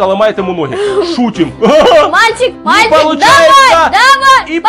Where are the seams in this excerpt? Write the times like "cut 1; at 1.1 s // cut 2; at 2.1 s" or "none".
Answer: none